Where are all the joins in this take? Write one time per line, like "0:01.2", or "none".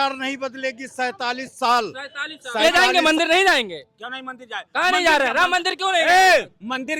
0:02.6